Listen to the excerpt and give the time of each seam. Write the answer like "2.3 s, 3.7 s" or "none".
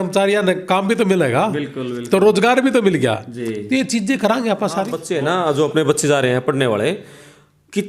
5.0 s